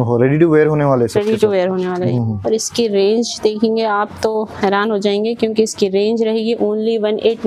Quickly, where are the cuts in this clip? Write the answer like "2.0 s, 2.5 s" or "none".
2.0 s